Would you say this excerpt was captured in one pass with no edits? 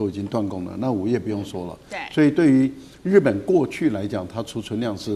yes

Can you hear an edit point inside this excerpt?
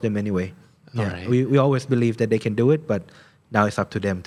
no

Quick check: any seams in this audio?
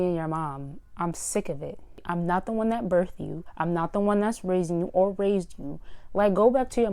no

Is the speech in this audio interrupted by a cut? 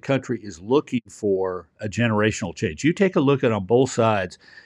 no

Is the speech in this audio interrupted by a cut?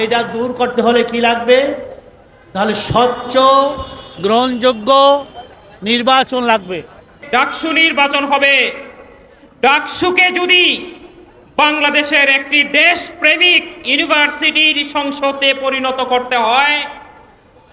yes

